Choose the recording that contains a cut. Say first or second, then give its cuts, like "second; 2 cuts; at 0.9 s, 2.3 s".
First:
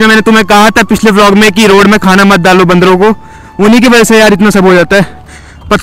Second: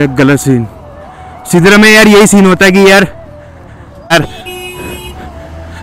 second; 1 cut; at 4.1 s